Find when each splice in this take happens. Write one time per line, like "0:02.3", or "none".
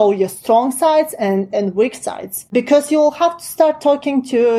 0:02.6